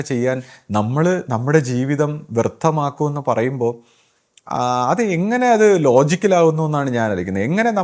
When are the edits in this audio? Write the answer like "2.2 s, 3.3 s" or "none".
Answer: none